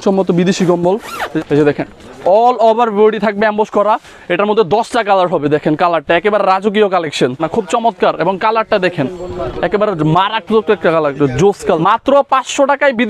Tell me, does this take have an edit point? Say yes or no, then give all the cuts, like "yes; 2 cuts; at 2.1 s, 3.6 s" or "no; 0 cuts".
yes; 3 cuts; at 1.3 s, 7.4 s, 11.8 s